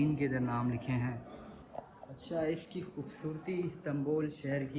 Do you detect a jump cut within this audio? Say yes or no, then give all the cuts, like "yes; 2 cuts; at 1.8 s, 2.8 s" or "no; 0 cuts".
yes; 1 cut; at 1.7 s